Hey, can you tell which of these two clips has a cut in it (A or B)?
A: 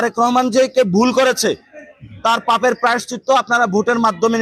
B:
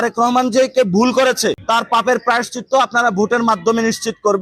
B